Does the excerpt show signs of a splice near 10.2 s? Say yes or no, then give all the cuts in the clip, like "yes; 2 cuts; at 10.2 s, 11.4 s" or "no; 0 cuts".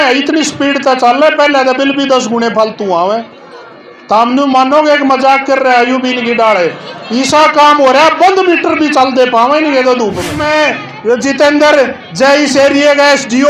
yes; 1 cut; at 10.2 s